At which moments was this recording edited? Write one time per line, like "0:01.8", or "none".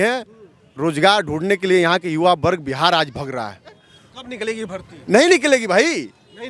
0:03.8